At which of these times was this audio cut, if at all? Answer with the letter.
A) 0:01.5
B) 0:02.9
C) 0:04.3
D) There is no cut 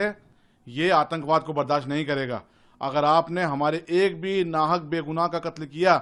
D